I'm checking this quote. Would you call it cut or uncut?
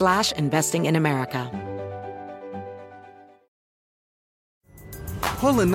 cut